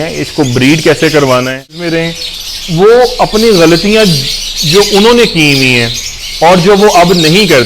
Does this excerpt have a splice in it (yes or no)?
yes